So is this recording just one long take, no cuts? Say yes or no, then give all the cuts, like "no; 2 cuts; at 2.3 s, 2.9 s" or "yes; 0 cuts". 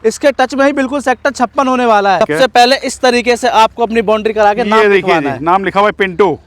no; 1 cut; at 2.2 s